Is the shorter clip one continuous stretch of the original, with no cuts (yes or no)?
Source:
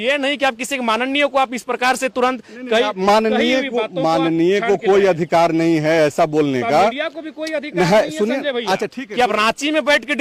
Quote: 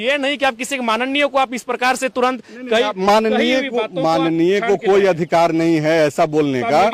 yes